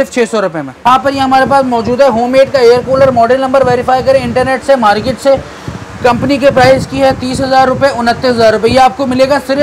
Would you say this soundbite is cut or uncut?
uncut